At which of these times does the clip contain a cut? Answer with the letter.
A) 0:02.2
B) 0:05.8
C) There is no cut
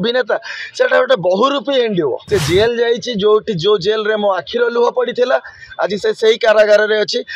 A